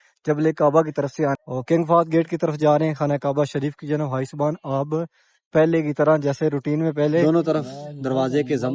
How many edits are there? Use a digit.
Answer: 2